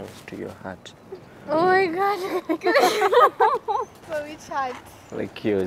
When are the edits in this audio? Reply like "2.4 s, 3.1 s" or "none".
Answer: 4.0 s